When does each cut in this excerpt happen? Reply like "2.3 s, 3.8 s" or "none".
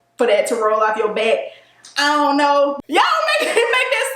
2.8 s